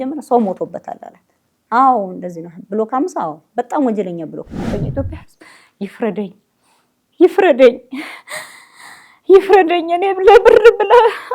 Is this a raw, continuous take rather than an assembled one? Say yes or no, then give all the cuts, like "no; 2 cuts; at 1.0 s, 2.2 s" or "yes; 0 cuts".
no; 1 cut; at 4.7 s